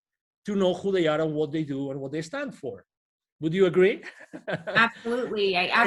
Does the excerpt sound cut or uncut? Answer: uncut